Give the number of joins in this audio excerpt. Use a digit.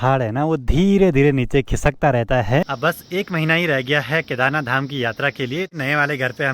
2